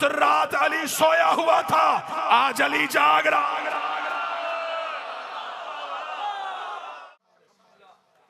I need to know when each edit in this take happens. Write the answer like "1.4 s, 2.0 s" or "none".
7.0 s